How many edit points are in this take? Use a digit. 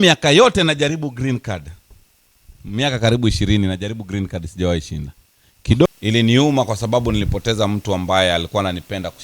1